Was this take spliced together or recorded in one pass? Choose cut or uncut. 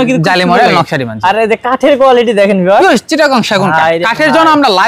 uncut